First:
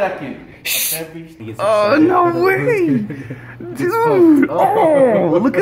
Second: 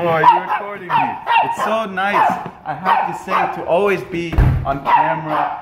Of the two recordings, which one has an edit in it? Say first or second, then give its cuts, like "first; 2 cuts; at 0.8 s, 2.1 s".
first; 1 cut; at 1.4 s